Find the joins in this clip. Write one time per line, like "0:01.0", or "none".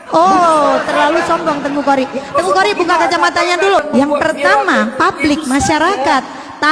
0:03.9

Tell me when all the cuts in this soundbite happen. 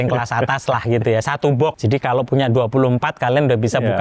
0:01.8

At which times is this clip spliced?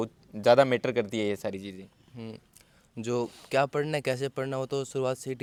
none

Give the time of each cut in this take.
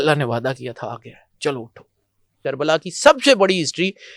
0:02.4

